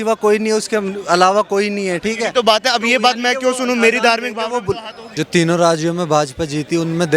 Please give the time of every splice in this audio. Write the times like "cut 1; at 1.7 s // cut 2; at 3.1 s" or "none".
cut 1; at 4.9 s